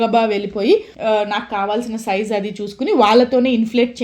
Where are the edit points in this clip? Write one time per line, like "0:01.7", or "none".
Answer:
0:00.9